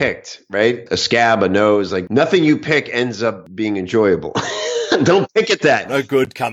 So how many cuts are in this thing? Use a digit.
1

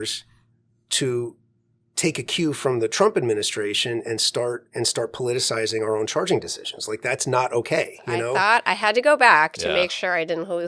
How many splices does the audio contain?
1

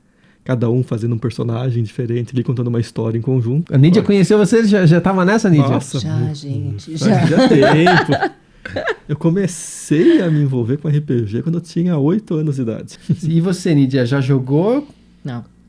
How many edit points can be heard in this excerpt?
2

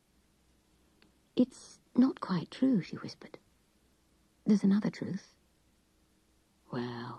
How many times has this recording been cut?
0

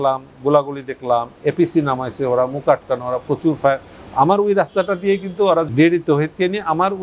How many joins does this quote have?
1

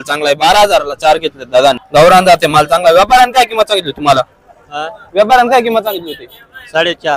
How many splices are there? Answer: 1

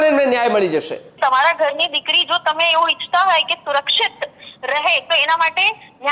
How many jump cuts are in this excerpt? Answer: 1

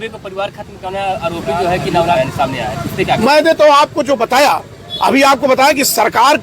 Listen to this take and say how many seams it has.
1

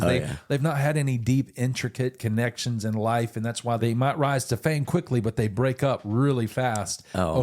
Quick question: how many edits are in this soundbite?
1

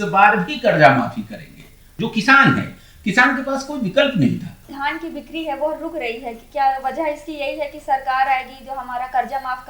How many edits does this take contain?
2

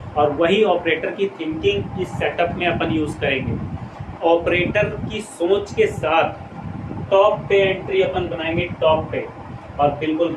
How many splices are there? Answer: 0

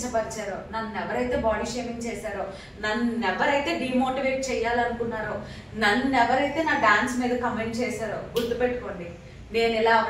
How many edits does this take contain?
0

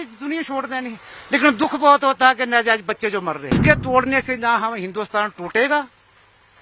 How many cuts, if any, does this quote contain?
1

